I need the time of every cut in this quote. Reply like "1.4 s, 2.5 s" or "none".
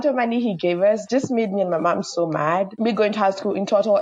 2.7 s